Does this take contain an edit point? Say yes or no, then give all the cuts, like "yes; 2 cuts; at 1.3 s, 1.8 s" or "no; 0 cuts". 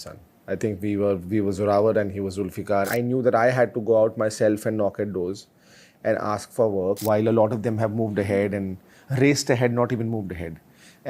yes; 2 cuts; at 2.9 s, 7.0 s